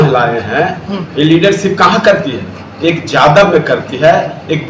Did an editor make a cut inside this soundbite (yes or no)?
no